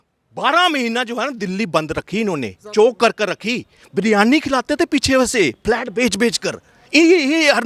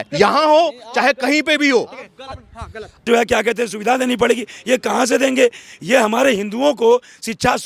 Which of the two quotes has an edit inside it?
second; 1 cut; at 3.1 s

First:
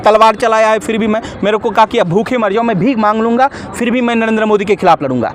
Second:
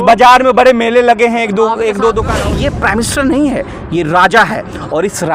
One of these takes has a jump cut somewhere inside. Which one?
second; 1 cut; at 2.4 s

